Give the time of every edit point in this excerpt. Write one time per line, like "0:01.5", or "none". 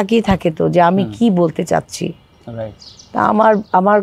none